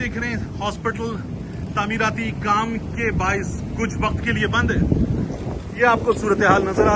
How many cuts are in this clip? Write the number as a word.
zero